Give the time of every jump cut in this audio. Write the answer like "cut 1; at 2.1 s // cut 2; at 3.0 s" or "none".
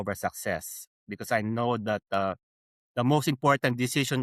none